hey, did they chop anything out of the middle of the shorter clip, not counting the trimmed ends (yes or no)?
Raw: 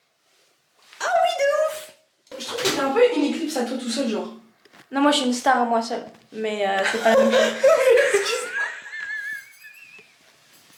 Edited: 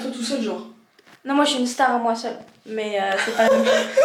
no